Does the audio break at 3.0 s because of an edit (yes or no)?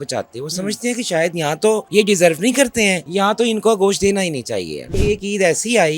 yes